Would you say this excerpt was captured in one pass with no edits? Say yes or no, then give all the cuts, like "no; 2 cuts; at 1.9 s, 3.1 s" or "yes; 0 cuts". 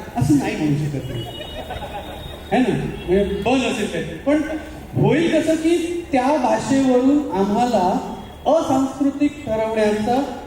yes; 0 cuts